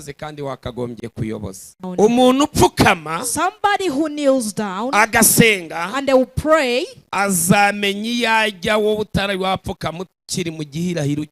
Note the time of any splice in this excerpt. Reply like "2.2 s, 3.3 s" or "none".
1.8 s